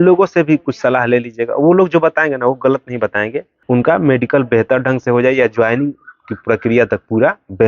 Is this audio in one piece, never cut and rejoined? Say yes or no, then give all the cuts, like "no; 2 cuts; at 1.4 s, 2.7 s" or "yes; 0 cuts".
no; 1 cut; at 3.5 s